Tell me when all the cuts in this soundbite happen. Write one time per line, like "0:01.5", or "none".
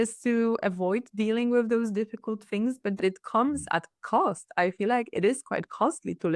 0:03.0